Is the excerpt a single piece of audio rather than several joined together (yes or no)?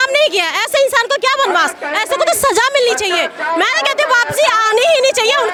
yes